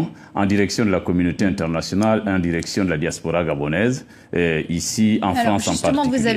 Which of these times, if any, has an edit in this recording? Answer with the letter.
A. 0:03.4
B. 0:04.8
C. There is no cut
B